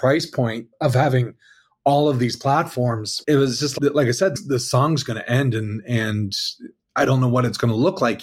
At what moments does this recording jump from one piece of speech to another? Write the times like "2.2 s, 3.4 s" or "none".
3.1 s, 3.7 s

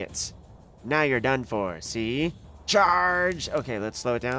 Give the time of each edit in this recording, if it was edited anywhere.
2.5 s

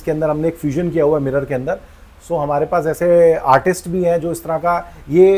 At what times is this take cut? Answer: none

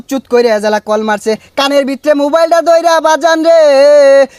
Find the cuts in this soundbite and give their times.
none

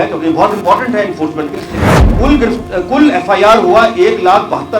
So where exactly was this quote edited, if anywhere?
2.1 s

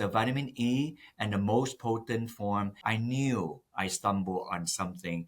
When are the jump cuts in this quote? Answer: 2.8 s

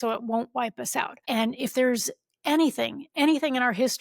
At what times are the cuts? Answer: 1.2 s

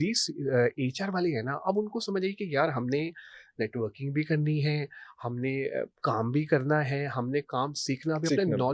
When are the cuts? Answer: none

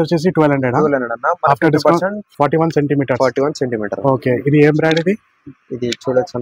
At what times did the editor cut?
2.2 s

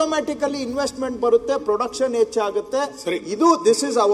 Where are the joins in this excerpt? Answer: none

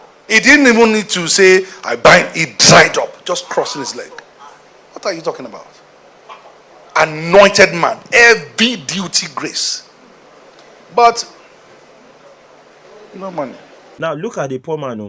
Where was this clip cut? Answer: 13.9 s

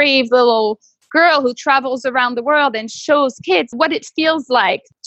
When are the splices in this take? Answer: 3.7 s

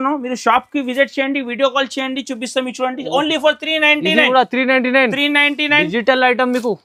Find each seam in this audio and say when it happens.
none

